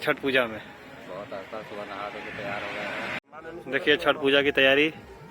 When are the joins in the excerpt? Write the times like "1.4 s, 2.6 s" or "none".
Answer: 3.2 s